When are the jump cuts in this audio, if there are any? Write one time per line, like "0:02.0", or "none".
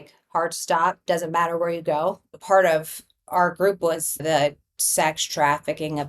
0:02.3
0:04.2

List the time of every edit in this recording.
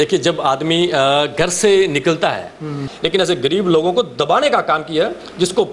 0:02.9

